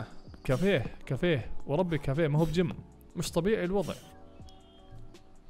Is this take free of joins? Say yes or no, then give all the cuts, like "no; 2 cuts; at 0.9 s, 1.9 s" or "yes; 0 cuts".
yes; 0 cuts